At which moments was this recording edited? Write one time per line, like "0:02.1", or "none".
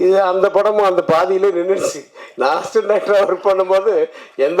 none